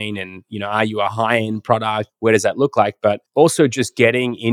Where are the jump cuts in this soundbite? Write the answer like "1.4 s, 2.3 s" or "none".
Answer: 2.1 s